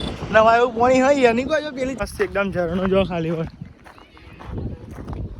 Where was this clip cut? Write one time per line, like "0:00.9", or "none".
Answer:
0:02.0